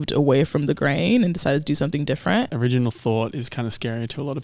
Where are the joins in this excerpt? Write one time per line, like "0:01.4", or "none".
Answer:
0:02.5

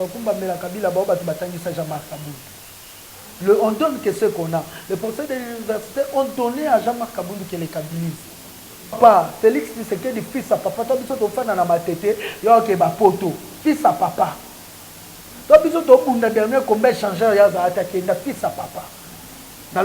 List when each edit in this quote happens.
0:09.0

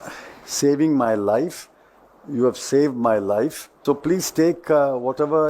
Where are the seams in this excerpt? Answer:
0:03.7

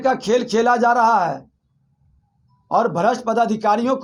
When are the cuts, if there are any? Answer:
none

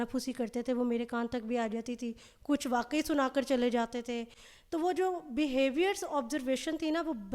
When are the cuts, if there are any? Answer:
none

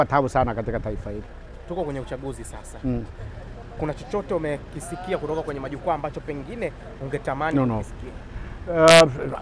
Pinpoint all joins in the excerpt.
none

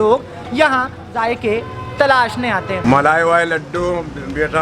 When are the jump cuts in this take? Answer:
0:02.8

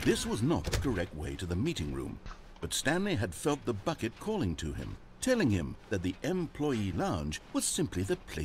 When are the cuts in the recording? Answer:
0:07.3

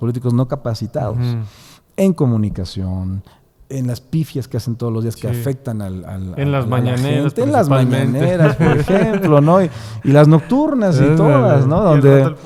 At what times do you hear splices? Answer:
none

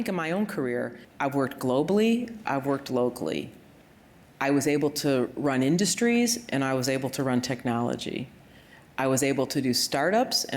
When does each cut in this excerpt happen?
0:01.0

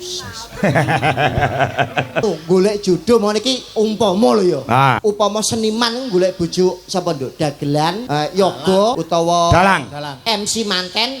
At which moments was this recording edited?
0:02.2
0:05.0
0:08.0
0:09.0

